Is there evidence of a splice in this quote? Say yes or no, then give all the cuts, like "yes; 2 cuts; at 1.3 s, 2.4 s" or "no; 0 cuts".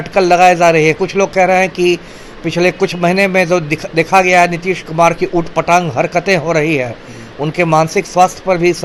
no; 0 cuts